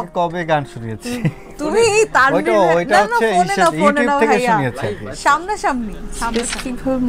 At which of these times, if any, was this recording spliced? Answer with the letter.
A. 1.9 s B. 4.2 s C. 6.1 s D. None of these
C